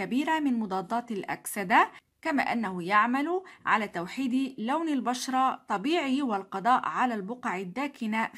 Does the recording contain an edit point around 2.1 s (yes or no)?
yes